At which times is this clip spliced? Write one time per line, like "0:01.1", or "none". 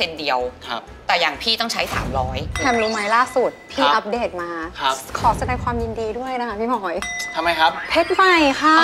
0:02.5